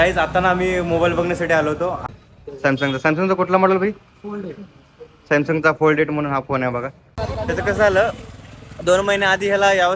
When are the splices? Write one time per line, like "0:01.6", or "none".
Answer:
0:02.0
0:07.1